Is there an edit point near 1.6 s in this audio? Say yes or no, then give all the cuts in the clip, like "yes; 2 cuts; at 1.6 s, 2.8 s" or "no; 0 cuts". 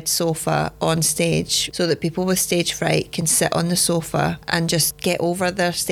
yes; 2 cuts; at 1.6 s, 4.9 s